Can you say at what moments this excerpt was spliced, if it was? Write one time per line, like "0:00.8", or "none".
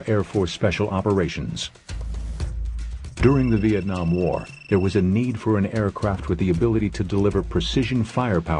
none